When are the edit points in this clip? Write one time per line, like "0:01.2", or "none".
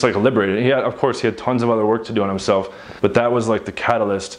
0:02.8

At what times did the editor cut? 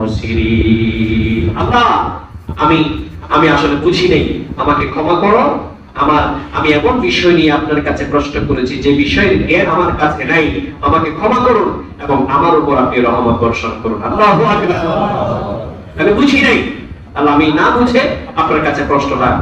none

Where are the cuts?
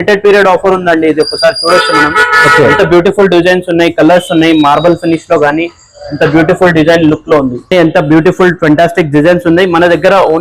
0:07.6

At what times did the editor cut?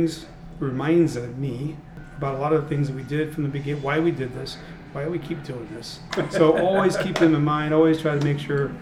0:06.1

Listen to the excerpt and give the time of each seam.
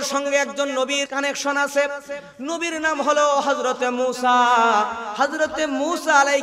0:01.1

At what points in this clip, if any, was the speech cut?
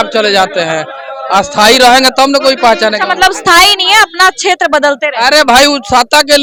none

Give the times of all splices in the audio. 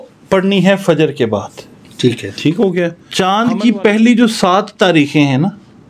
0:03.0

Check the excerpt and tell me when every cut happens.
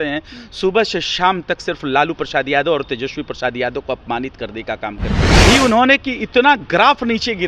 0:05.4

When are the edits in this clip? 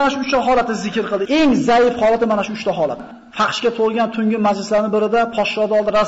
0:01.2
0:03.1

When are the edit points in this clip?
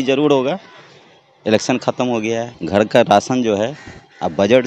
0:02.6

